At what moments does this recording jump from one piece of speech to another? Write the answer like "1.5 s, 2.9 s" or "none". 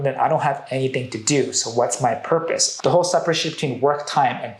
2.7 s